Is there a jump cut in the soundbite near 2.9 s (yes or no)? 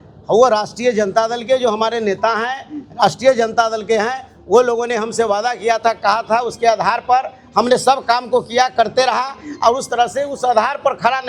no